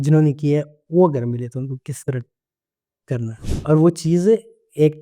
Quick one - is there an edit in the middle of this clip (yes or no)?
yes